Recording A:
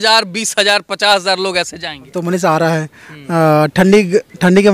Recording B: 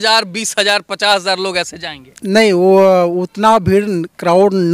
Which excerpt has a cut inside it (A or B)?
A